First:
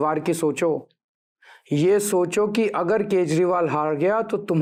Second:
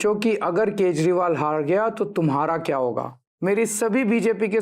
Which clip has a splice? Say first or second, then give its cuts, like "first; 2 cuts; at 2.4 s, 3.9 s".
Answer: second; 1 cut; at 3.2 s